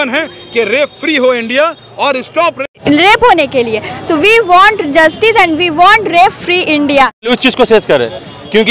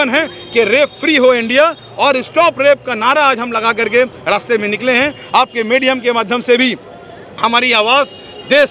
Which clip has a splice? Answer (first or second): first